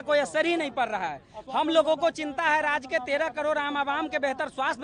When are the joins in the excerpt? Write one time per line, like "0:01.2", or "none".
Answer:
none